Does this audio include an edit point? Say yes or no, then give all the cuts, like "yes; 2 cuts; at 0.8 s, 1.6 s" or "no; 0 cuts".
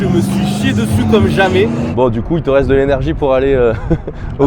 yes; 1 cut; at 1.9 s